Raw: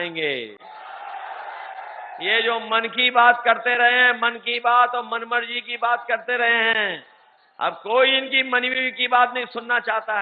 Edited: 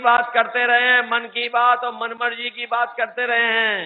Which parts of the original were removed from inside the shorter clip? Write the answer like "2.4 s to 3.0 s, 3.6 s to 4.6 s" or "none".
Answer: none